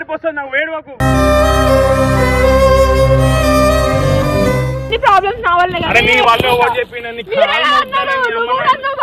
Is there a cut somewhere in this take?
no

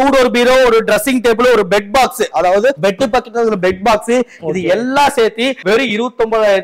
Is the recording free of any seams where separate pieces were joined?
yes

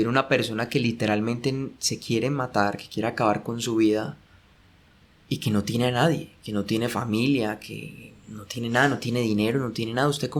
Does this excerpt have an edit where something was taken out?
no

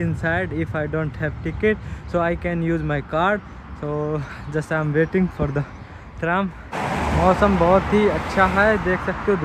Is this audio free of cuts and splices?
yes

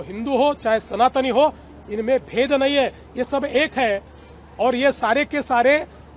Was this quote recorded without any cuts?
yes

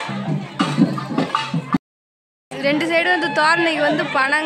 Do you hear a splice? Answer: yes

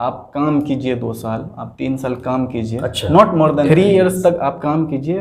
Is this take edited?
yes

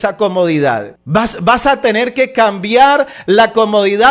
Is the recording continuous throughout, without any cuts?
no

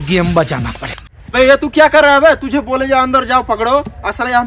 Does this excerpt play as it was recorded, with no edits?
no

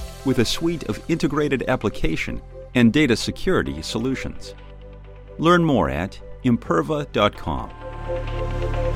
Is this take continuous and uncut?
no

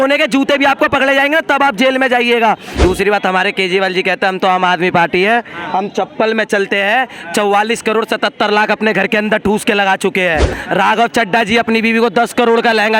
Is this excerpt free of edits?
no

